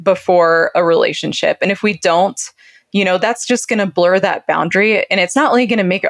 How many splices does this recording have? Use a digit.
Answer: 0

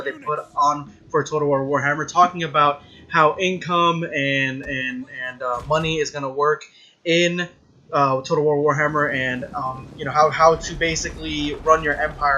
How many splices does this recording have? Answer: 1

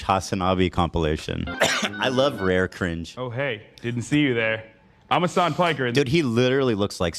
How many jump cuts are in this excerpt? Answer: 1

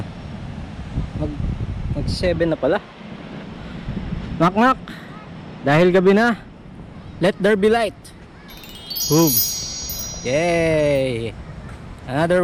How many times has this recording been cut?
1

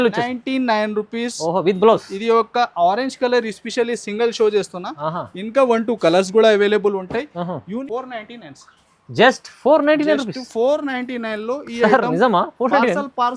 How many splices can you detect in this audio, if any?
1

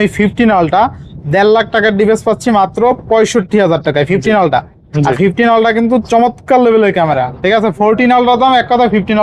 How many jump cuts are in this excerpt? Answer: 0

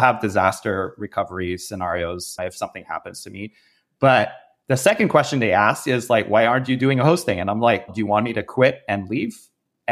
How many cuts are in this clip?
2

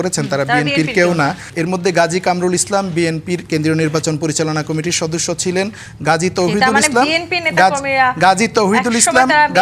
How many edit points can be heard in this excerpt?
2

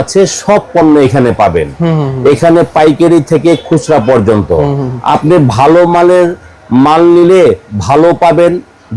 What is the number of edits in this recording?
0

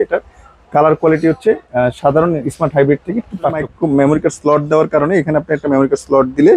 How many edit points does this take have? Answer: 1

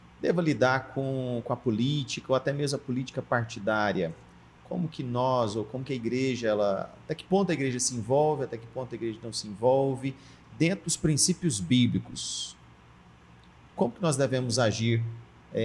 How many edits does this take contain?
0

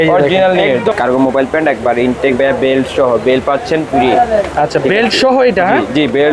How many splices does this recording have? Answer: 1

